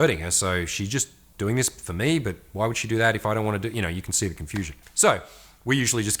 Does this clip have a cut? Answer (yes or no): yes